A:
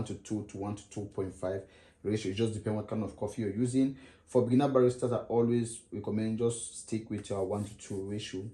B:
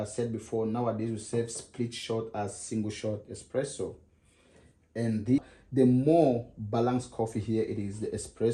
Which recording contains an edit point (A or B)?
B